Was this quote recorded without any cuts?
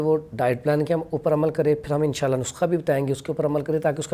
yes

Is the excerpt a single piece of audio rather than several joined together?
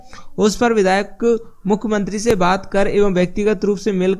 yes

